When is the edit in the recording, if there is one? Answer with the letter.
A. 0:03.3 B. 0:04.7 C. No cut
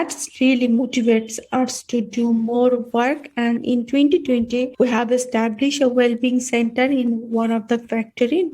B